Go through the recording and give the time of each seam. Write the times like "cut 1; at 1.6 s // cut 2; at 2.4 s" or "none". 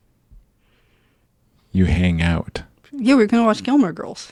none